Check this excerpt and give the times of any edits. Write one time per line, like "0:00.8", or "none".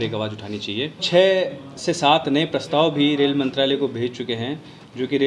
0:01.0